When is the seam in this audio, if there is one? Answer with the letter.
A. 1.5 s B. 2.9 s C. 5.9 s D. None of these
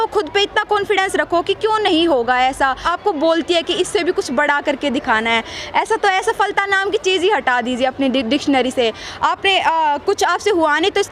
B